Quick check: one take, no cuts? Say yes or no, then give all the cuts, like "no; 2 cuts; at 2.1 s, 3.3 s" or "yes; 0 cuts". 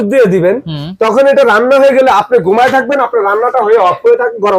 yes; 0 cuts